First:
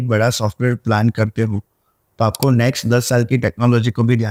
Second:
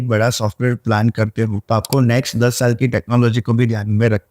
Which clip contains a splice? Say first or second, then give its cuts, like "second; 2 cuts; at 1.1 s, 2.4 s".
second; 1 cut; at 1.6 s